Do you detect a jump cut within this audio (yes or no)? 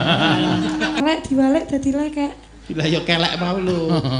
yes